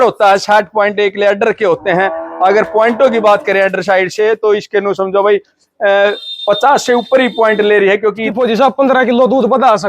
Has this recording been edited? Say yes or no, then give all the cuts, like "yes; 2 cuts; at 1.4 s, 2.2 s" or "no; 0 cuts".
yes; 1 cut; at 8.3 s